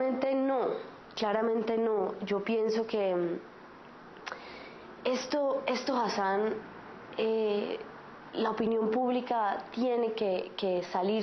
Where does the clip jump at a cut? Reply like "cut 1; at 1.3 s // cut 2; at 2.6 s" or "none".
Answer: cut 1; at 6.0 s